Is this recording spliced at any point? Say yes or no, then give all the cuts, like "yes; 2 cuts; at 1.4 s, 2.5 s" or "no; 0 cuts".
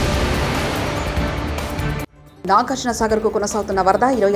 yes; 1 cut; at 2.1 s